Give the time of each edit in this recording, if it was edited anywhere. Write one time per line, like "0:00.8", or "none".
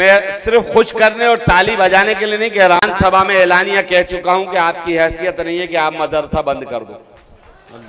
0:02.8